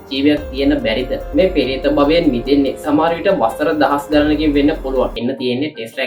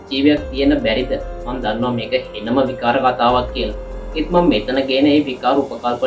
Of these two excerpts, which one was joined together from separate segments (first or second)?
first